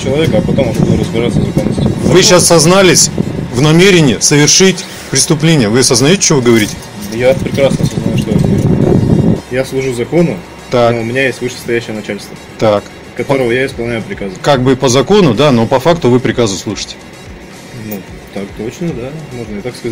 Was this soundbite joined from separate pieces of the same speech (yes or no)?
yes